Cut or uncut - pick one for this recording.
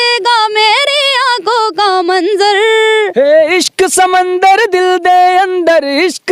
uncut